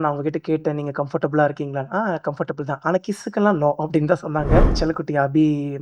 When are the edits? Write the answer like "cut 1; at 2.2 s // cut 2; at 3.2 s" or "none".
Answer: cut 1; at 4.7 s